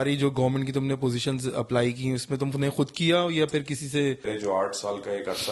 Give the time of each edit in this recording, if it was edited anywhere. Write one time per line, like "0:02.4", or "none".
0:04.3